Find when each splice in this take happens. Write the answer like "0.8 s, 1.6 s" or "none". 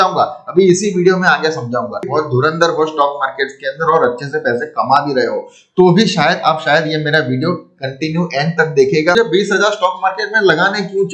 2.1 s, 9.1 s